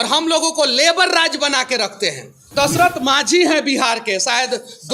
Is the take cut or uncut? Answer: cut